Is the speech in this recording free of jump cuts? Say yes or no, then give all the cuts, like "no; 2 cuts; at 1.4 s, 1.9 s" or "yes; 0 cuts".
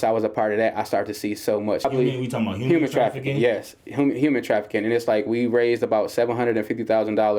no; 1 cut; at 1.8 s